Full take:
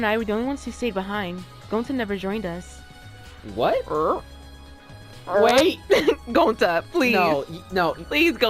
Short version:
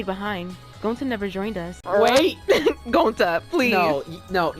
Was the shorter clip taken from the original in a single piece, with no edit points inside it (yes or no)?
no